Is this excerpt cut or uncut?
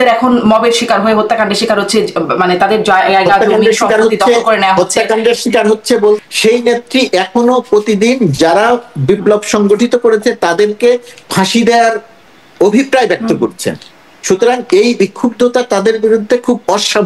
cut